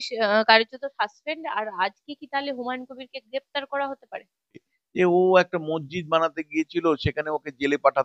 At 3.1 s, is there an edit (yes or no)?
no